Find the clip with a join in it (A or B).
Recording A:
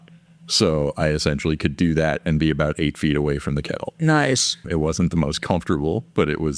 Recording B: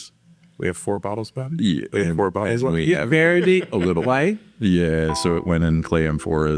A